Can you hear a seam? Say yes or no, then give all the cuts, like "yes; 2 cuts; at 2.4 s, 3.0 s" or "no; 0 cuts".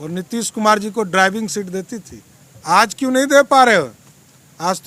no; 0 cuts